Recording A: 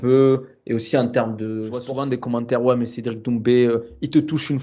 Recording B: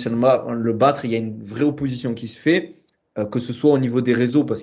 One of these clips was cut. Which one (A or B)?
A